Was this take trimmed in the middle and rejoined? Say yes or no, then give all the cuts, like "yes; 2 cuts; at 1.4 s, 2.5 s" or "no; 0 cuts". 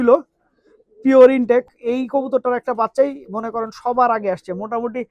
yes; 1 cut; at 1.7 s